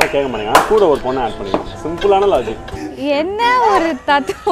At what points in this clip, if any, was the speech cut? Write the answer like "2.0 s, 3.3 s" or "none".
3.0 s